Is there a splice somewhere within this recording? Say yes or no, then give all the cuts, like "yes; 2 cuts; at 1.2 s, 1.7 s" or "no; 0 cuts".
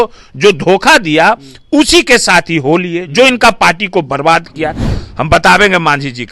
yes; 1 cut; at 4.8 s